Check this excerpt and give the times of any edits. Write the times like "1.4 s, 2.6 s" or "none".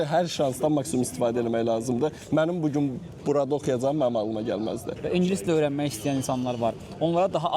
4.9 s